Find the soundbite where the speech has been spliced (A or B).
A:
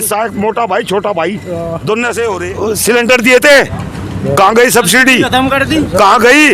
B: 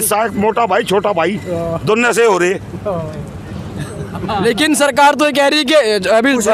A